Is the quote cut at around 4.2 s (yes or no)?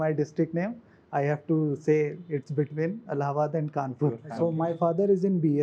yes